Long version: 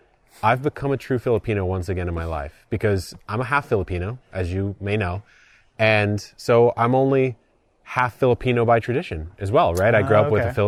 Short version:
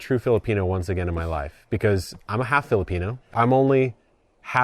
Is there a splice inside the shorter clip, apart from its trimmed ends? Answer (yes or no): yes